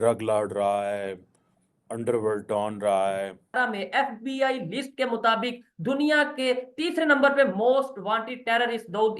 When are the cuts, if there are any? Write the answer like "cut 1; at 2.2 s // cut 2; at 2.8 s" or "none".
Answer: cut 1; at 3.5 s